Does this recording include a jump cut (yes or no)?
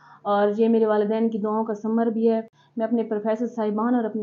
yes